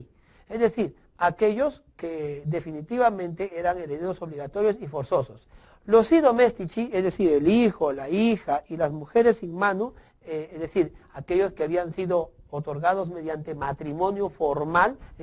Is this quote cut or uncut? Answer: uncut